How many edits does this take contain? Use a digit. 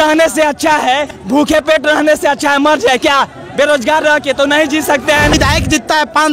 2